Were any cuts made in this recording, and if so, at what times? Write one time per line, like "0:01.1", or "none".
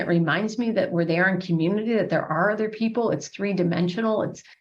none